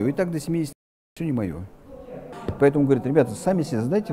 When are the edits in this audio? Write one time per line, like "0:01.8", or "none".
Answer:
0:02.4